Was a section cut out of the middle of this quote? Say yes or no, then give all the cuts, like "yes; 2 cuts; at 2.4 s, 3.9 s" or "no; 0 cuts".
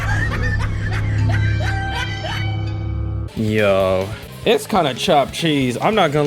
yes; 1 cut; at 3.3 s